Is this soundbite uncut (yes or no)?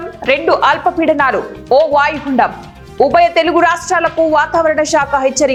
yes